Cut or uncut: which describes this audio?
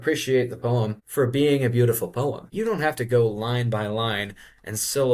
cut